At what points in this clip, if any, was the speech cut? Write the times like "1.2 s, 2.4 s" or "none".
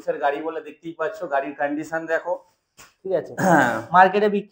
none